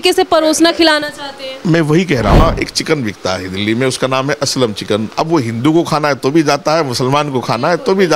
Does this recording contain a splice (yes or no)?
yes